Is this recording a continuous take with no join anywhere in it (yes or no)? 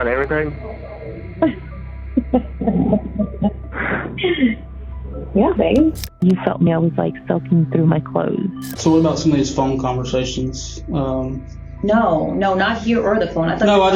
no